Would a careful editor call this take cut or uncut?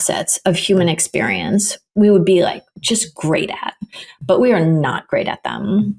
uncut